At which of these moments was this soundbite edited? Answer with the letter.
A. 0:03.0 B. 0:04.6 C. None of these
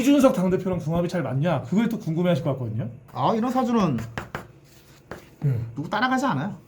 A